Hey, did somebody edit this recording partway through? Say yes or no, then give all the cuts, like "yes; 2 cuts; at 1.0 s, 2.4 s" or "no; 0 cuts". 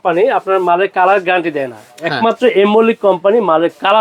no; 0 cuts